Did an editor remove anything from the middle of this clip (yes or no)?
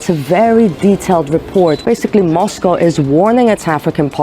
yes